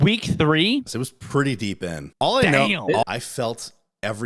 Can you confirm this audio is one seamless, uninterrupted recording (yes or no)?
no